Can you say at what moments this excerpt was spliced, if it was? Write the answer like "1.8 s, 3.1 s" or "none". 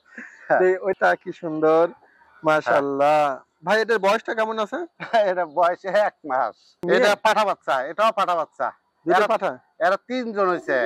0.9 s, 6.7 s